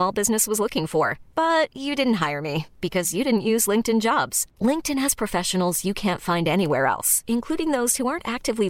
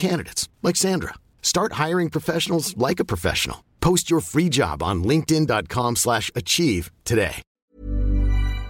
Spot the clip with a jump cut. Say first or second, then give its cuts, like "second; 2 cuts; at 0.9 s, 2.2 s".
second; 1 cut; at 7.5 s